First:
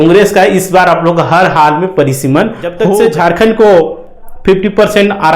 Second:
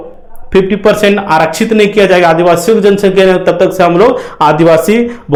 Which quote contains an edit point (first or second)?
first